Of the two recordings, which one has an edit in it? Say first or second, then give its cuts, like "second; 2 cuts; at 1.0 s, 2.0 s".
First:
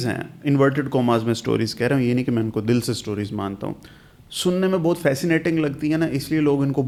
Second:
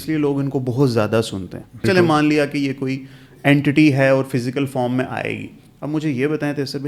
second; 1 cut; at 1.8 s